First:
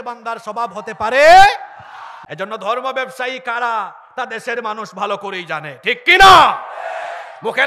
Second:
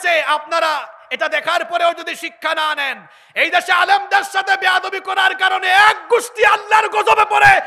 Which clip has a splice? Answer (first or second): first